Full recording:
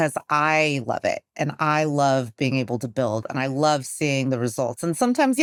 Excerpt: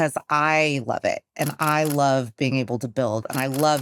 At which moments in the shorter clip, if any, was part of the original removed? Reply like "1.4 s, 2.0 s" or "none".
none